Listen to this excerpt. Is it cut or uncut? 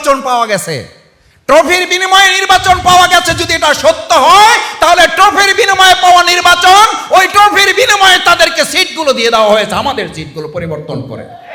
uncut